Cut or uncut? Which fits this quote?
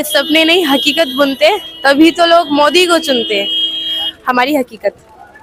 uncut